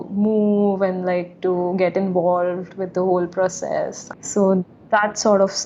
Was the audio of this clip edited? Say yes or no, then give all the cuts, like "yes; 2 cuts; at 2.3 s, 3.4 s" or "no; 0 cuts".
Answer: no; 0 cuts